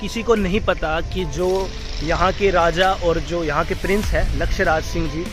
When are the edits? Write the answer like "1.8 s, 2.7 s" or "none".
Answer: none

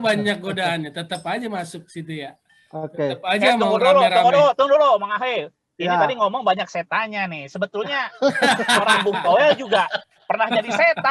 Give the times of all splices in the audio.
none

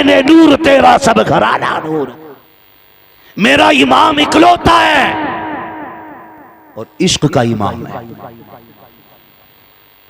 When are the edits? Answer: 2.2 s

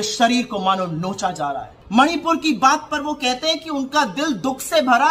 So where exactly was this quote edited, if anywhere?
1.7 s

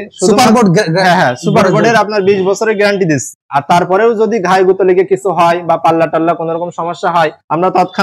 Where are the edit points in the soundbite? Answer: 3.4 s

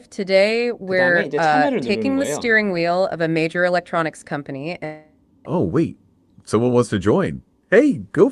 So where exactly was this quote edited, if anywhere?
none

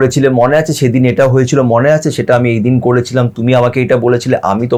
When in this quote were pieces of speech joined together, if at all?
none

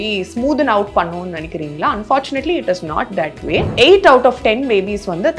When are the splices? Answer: 3.7 s

